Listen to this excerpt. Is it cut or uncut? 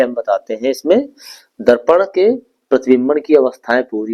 uncut